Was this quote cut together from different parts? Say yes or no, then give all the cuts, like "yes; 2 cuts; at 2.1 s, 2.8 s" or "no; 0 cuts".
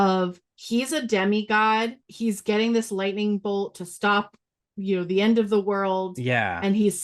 yes; 1 cut; at 2.0 s